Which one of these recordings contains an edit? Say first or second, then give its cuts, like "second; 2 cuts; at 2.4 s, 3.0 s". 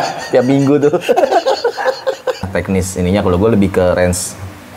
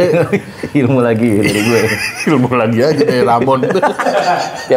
first; 1 cut; at 2.5 s